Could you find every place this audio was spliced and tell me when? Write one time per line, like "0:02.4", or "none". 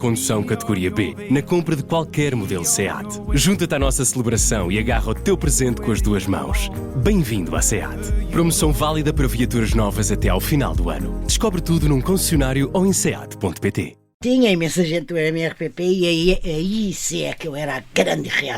0:14.2